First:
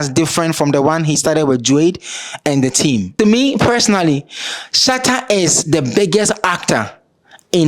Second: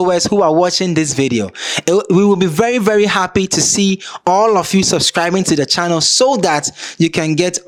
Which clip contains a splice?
first; 1 cut; at 3.1 s

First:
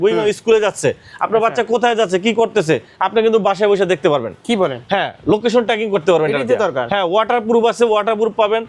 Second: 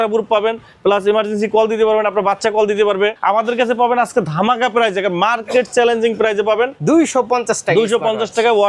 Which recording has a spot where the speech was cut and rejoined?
second; 2 cuts; at 3.2 s, 6.8 s

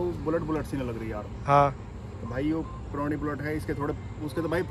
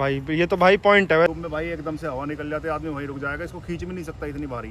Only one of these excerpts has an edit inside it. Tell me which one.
second; 1 cut; at 1.3 s

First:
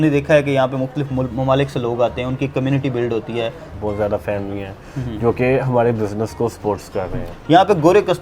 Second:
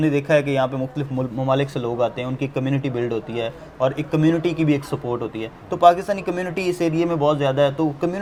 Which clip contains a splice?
first; 2 cuts; at 3.7 s, 7.3 s

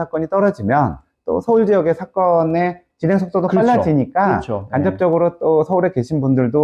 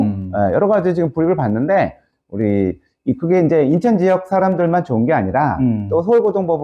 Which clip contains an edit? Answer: second; 1 cut; at 2.1 s

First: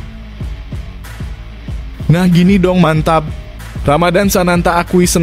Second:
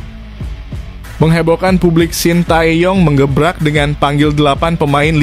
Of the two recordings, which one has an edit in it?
second; 1 cut; at 1.1 s

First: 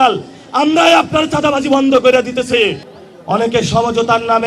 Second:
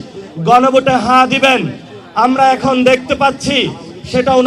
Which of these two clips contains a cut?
first; 1 cut; at 2.9 s

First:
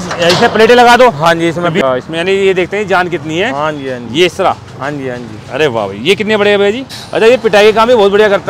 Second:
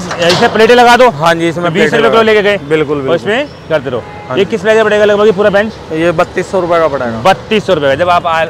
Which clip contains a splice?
first; 2 cuts; at 1.8 s, 6.9 s

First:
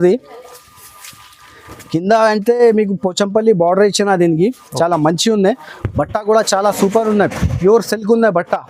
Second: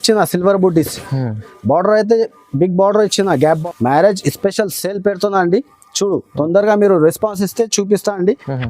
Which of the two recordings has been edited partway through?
second; 1 cut; at 3.6 s

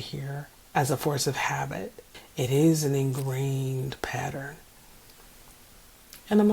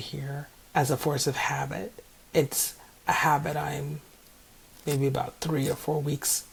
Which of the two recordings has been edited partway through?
first; 1 cut; at 2.1 s

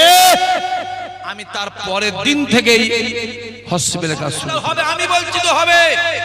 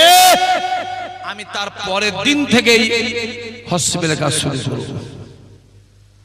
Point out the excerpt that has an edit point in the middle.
first; 1 cut; at 4.5 s

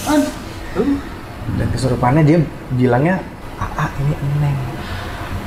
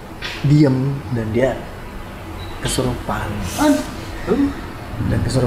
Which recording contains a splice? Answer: first; 1 cut; at 3.4 s

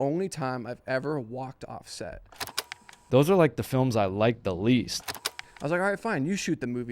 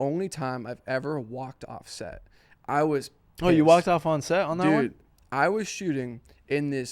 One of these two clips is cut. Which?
first; 2 cuts; at 2.7 s, 5.2 s

